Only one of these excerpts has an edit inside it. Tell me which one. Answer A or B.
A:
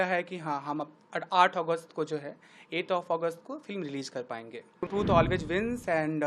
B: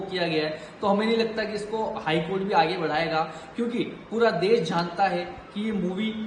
A